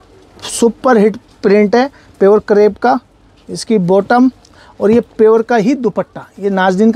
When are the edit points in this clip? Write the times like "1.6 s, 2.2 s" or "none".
none

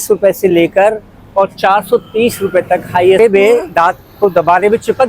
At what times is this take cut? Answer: 3.2 s

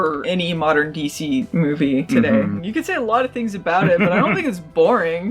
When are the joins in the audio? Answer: 2.6 s

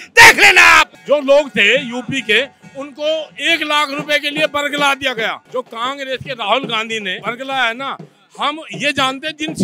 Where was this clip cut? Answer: 1.0 s, 5.4 s, 7.1 s

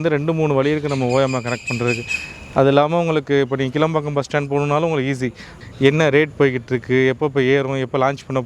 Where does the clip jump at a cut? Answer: 5.5 s

